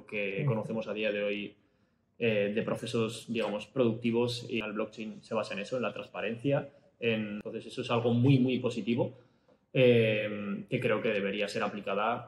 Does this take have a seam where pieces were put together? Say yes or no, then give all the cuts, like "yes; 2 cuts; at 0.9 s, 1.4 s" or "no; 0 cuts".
yes; 2 cuts; at 4.6 s, 7.4 s